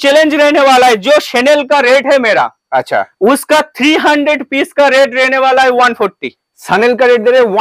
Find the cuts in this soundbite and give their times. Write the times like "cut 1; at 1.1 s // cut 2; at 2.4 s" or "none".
none